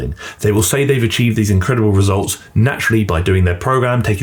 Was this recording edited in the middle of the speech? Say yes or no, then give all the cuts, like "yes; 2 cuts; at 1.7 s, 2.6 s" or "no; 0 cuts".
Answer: no; 0 cuts